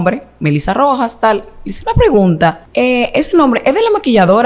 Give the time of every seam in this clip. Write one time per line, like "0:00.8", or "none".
0:02.6